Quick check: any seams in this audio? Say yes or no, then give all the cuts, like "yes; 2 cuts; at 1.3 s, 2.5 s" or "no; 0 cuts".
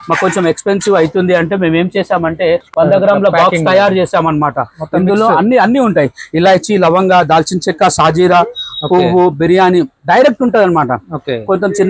no; 0 cuts